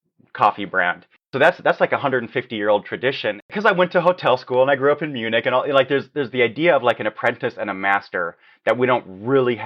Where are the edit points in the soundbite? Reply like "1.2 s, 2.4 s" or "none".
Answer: 3.5 s